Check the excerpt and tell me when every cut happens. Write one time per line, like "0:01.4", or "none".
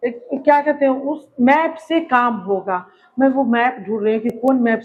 none